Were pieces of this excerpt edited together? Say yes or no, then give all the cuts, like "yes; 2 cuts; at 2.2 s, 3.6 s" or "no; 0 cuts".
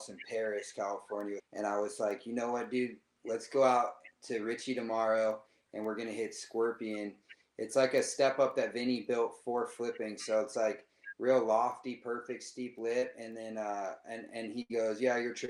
yes; 1 cut; at 1.5 s